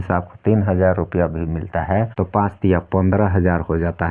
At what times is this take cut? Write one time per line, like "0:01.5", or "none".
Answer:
none